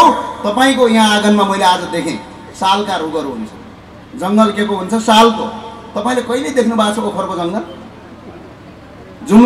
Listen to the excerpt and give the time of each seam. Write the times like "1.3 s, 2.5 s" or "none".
none